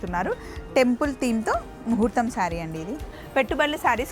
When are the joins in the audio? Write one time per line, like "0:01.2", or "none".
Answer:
0:03.2